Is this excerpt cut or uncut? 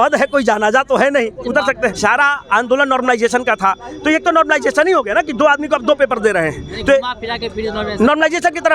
cut